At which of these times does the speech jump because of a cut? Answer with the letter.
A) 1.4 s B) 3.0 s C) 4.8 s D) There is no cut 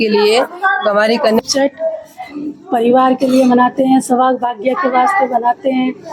A